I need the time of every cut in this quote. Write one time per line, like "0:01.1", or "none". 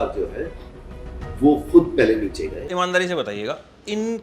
0:02.7